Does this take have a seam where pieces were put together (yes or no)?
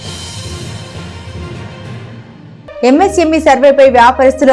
yes